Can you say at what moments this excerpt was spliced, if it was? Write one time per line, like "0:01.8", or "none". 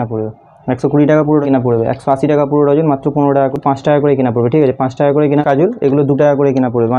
0:01.4
0:03.5
0:05.4

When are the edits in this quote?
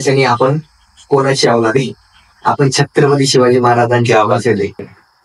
none

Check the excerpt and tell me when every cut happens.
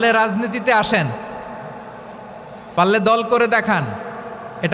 none

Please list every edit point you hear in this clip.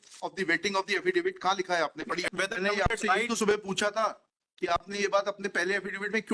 0:02.3

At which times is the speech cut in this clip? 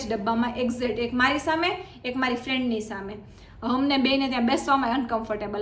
none

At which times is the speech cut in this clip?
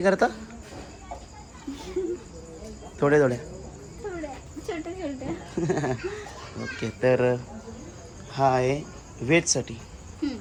none

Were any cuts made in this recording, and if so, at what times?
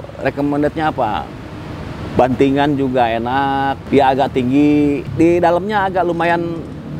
0:03.8
0:05.1

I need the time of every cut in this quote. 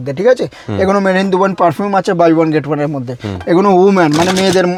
none

